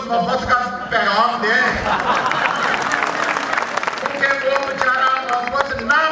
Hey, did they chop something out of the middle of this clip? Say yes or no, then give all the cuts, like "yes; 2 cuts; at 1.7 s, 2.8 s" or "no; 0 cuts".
yes; 1 cut; at 4.0 s